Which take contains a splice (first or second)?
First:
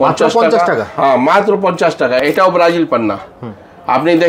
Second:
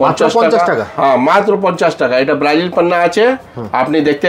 first